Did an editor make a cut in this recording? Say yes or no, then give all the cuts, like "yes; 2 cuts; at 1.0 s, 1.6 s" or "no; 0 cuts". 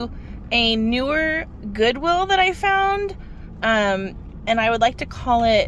no; 0 cuts